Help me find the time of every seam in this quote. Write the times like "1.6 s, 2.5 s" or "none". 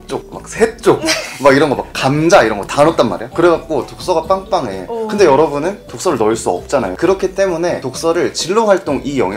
none